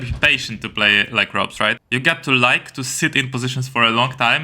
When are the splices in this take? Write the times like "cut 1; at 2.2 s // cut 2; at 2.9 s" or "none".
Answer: cut 1; at 1.8 s